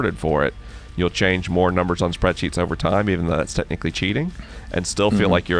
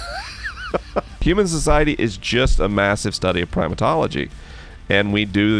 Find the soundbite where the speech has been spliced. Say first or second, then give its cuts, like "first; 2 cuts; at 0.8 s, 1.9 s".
second; 1 cut; at 1.1 s